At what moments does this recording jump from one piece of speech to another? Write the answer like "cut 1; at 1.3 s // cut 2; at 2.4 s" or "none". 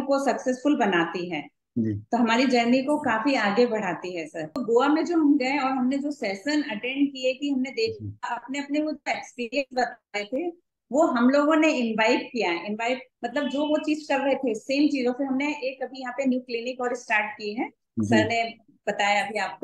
cut 1; at 4.6 s